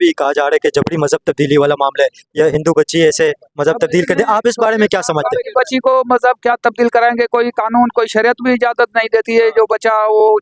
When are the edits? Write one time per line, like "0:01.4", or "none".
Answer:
none